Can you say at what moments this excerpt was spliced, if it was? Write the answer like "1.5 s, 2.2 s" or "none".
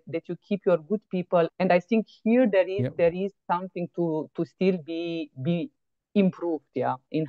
1.5 s